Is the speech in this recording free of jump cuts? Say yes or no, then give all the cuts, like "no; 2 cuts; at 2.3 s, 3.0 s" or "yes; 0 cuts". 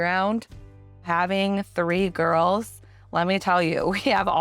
no; 1 cut; at 1.0 s